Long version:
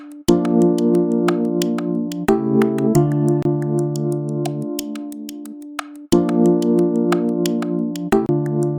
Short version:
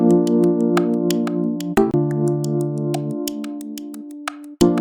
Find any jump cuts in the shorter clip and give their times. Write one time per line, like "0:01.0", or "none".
0:01.9